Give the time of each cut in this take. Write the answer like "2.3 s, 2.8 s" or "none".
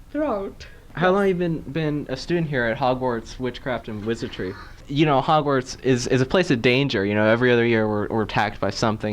0.9 s, 4.8 s

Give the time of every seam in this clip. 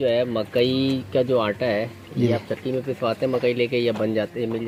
none

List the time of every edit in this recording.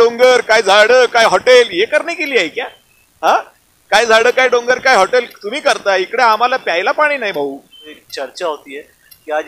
8.0 s

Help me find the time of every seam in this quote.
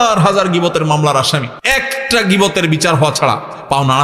1.6 s

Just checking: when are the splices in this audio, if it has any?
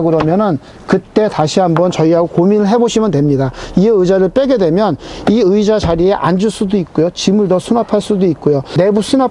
none

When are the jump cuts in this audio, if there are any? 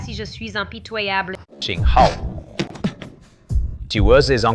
1.5 s

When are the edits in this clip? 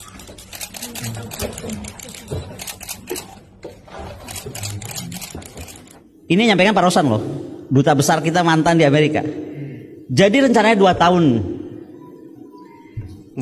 5.8 s

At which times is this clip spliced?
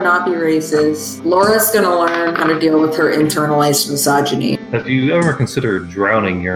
1.1 s, 4.7 s

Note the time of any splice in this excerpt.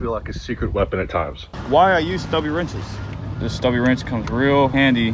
1.4 s, 3.0 s

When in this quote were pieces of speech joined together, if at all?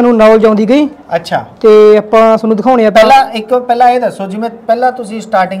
none

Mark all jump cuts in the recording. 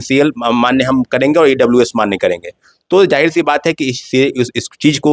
none

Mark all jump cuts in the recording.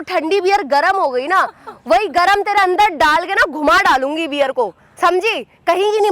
none

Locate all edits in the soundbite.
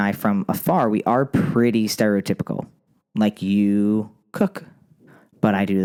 none

